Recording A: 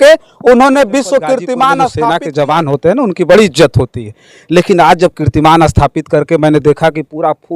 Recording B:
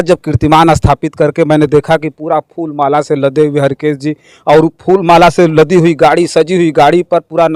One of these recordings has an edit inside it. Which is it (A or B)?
A